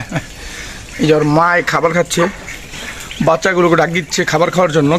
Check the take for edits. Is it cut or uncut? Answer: uncut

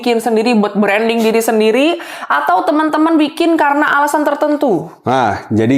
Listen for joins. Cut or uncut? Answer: uncut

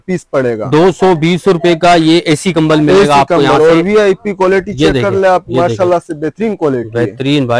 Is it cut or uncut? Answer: uncut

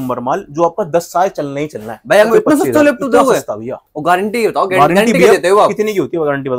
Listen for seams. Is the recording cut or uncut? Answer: cut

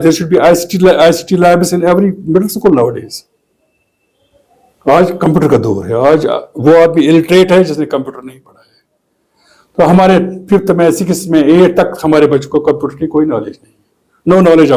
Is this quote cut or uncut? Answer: uncut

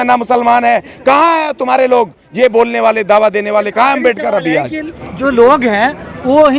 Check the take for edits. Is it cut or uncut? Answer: uncut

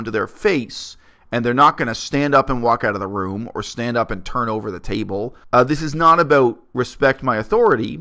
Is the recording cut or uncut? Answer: cut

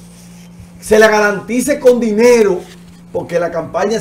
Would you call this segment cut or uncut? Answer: uncut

